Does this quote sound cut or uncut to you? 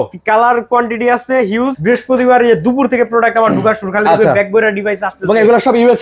cut